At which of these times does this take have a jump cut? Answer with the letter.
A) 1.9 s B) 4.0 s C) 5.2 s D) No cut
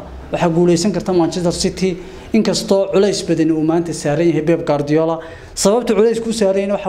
D